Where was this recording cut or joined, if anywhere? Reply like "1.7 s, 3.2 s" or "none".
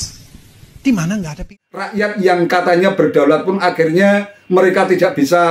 1.4 s